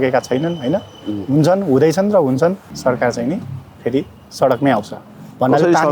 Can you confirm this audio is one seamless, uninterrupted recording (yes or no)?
no